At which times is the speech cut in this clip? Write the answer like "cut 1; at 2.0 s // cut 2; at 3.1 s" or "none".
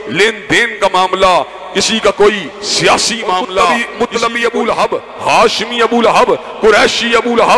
cut 1; at 3.9 s